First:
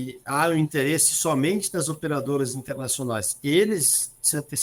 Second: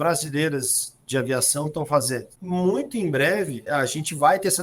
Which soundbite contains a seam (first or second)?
second